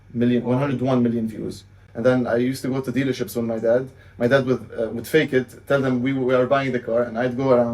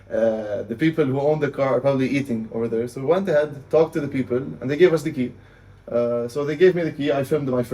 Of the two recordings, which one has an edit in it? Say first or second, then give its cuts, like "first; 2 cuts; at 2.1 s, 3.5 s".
first; 1 cut; at 1.8 s